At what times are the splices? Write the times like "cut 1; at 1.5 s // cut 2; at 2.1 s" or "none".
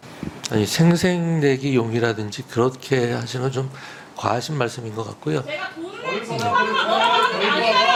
none